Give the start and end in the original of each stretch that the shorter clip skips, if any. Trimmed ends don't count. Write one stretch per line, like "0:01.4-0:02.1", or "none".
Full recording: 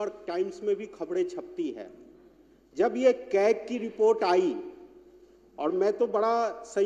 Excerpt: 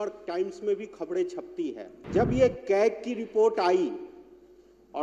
0:01.9-0:02.6